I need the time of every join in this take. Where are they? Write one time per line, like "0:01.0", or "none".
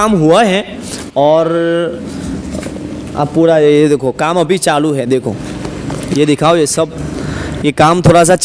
none